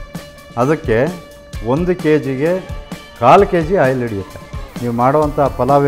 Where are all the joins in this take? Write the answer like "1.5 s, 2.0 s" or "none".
4.8 s

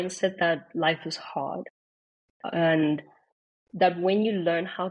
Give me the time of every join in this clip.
none

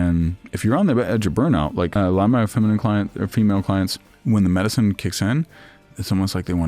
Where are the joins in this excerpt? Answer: 1.9 s, 4.1 s

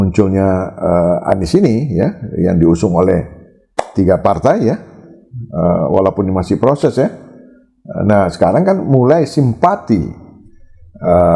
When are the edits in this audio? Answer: none

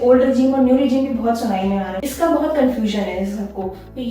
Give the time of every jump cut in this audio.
2.0 s

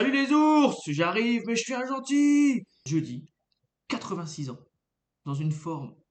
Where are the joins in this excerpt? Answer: 2.8 s

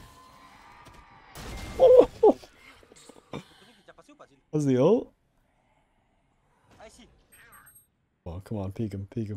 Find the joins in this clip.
8.3 s

